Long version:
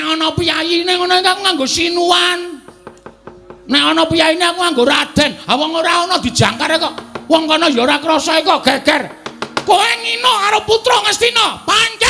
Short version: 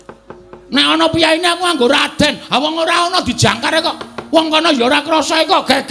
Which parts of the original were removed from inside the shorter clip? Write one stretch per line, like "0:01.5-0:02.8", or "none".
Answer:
none